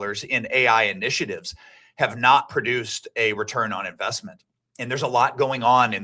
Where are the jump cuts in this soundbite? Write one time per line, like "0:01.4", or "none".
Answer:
none